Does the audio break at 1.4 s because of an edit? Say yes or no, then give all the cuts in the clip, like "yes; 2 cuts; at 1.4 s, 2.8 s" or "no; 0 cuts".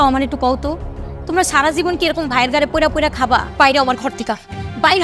no; 1 cut; at 3.5 s